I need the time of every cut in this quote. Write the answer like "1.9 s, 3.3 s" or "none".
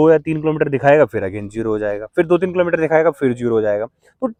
none